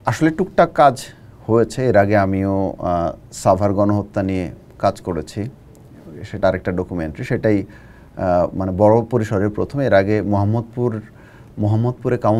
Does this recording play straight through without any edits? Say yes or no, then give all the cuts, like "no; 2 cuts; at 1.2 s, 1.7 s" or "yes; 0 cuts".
yes; 0 cuts